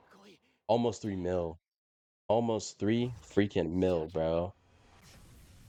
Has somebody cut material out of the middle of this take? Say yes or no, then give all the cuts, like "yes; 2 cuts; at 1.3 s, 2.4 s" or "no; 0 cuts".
no; 0 cuts